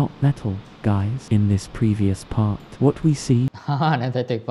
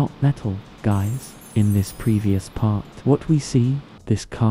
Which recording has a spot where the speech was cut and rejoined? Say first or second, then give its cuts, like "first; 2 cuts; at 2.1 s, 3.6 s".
first; 2 cuts; at 1.2 s, 3.6 s